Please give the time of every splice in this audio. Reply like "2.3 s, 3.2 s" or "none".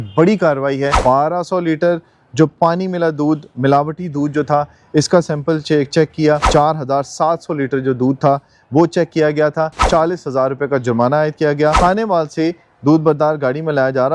1.0 s, 6.4 s, 9.8 s, 11.8 s

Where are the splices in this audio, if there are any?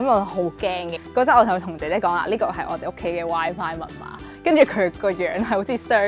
0.9 s

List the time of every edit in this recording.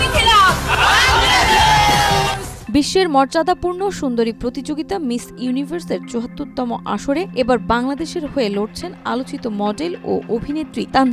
none

